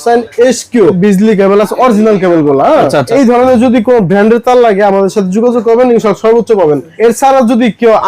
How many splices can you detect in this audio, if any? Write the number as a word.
three